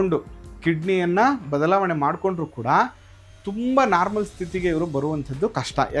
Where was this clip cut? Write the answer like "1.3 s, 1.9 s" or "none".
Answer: none